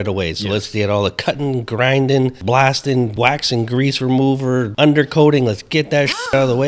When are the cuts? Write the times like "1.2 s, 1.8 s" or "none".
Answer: 2.4 s, 3.1 s, 4.7 s